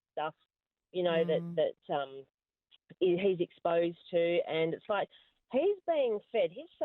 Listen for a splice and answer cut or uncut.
uncut